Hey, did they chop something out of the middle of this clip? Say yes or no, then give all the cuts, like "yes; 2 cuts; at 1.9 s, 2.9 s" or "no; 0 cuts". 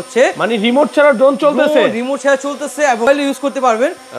yes; 1 cut; at 3.1 s